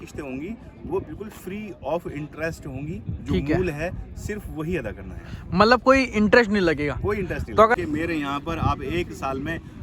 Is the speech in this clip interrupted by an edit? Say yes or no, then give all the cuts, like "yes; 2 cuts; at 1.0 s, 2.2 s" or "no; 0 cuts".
yes; 1 cut; at 7.7 s